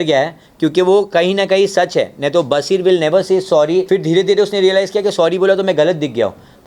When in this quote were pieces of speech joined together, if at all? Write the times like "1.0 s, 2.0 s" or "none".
3.9 s